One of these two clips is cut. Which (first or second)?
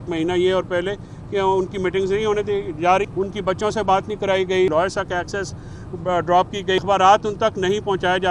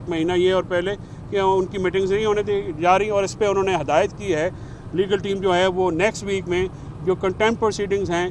first